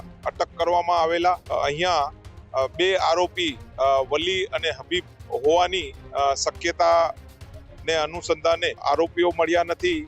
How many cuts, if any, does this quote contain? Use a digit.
2